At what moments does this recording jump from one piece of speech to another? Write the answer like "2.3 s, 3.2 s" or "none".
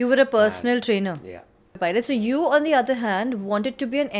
1.7 s